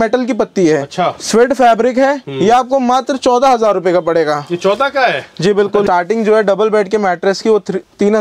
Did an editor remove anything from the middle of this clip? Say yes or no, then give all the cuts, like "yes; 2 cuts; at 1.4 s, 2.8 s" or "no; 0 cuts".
yes; 1 cut; at 5.9 s